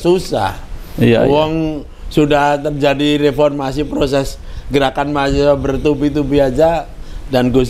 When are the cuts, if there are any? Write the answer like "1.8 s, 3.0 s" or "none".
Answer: none